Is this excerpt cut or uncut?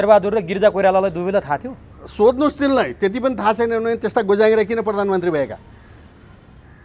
uncut